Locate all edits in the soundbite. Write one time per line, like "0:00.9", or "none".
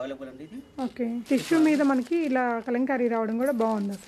0:01.2